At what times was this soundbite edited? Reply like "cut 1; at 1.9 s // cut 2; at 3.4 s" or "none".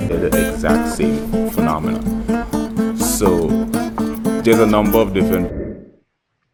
none